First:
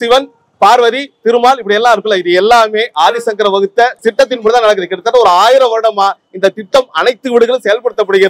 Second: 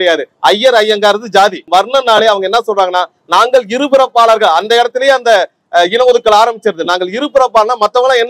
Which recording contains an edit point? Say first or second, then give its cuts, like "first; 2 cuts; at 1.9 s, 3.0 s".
second; 1 cut; at 1.6 s